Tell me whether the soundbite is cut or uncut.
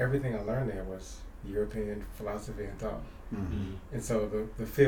uncut